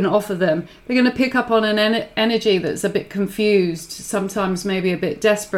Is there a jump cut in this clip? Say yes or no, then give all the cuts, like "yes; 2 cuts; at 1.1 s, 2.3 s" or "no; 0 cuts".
no; 0 cuts